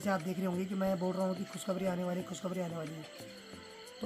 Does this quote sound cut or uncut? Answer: uncut